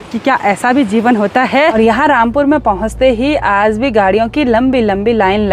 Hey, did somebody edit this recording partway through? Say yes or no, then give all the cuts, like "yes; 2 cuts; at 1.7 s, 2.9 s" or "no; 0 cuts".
yes; 1 cut; at 1.7 s